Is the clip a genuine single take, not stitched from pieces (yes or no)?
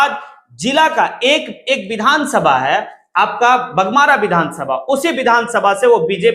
yes